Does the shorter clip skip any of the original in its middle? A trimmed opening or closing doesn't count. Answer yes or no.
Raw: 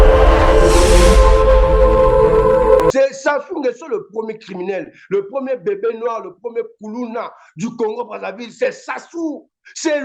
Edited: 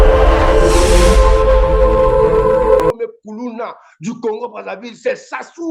yes